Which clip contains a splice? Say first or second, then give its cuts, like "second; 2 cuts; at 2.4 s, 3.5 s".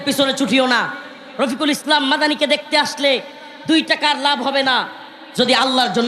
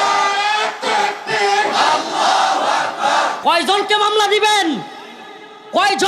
second; 1 cut; at 3.4 s